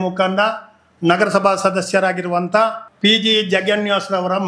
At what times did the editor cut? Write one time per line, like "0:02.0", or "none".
0:02.8